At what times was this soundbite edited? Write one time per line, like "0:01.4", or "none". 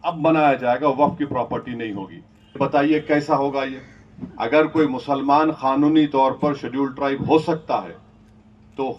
0:02.6